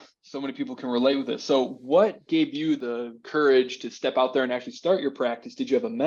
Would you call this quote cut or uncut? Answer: uncut